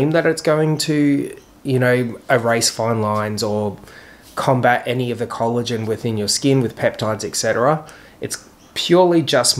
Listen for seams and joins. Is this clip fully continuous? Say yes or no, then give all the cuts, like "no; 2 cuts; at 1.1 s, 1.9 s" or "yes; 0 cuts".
yes; 0 cuts